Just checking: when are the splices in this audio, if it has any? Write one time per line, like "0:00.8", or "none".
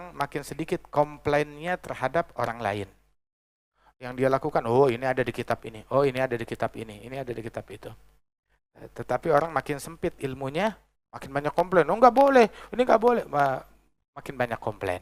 none